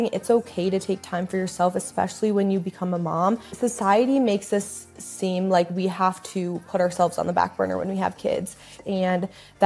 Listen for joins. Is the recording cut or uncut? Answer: cut